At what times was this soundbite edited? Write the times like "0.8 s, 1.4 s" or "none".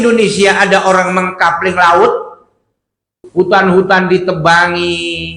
3.2 s